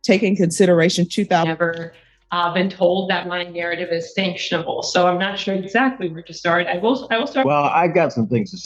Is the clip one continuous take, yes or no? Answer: no